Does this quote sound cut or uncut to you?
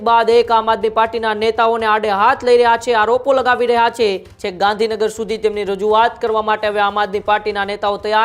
cut